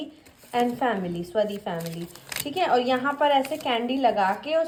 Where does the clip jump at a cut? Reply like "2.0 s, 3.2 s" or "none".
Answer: none